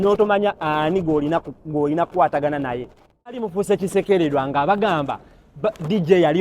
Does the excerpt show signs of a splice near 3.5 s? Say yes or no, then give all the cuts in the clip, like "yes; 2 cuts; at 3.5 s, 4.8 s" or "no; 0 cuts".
yes; 1 cut; at 3.5 s